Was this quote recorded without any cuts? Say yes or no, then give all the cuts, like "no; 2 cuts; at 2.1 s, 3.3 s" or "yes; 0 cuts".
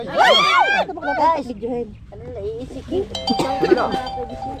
no; 1 cut; at 0.9 s